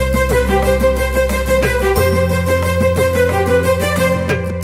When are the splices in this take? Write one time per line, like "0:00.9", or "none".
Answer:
none